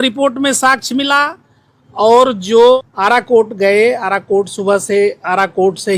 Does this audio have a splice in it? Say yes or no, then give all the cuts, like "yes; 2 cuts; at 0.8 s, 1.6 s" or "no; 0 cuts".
yes; 1 cut; at 2.8 s